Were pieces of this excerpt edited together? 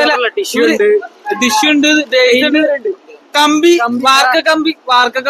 no; 0 cuts

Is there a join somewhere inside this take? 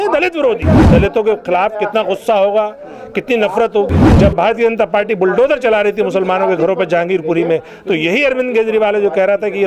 yes; 2 cuts; at 0.8 s, 4.1 s

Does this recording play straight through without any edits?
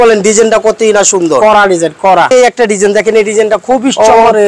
no; 1 cut; at 2.3 s

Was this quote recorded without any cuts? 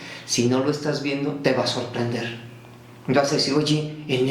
yes; 0 cuts

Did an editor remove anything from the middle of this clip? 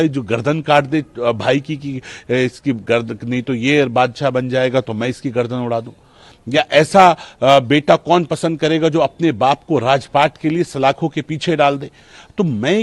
no; 0 cuts

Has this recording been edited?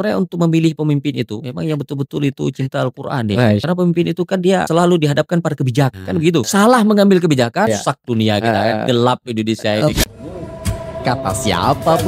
yes; 6 cuts; at 1.3 s, 3.6 s, 4.7 s, 6.0 s, 7.7 s, 9.9 s

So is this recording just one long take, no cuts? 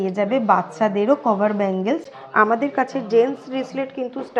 no; 1 cut; at 2.0 s

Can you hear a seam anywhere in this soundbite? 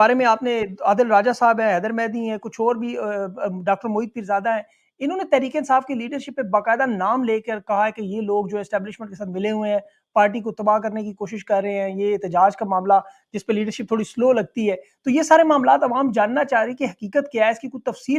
no; 0 cuts

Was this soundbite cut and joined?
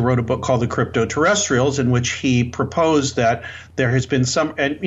no; 0 cuts

